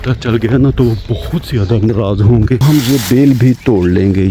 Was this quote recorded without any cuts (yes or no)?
no